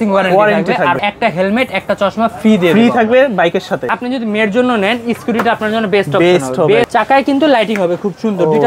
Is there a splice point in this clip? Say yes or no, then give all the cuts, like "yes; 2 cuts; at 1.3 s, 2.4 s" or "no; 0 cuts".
yes; 3 cuts; at 1.0 s, 3.9 s, 6.9 s